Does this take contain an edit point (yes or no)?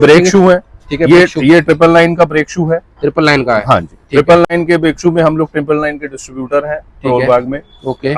no